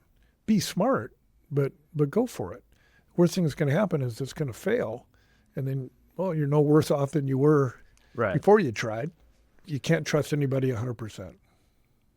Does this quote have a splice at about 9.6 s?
yes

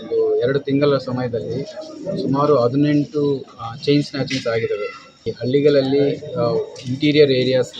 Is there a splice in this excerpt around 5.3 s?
yes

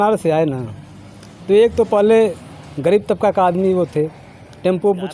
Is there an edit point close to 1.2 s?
no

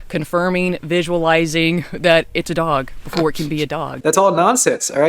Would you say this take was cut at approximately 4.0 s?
yes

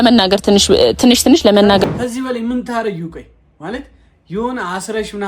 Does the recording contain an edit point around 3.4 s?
no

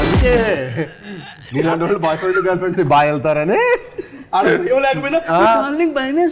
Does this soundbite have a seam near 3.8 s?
no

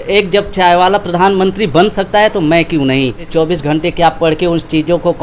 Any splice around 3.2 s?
yes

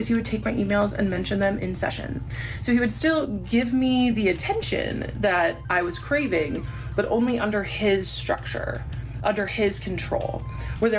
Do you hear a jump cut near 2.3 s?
no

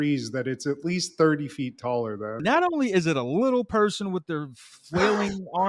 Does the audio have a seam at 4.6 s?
no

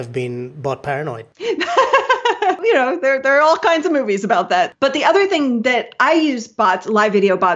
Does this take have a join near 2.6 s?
yes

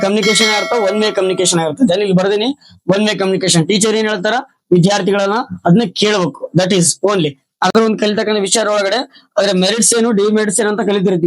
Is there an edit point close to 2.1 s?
no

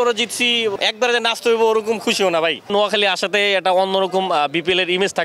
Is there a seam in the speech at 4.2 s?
no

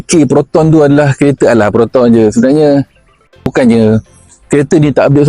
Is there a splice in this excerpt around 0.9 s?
no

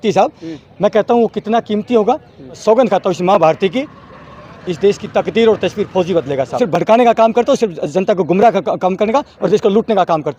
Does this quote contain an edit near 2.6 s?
yes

